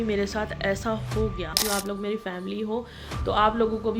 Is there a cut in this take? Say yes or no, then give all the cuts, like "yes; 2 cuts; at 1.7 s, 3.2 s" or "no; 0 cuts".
yes; 1 cut; at 1.6 s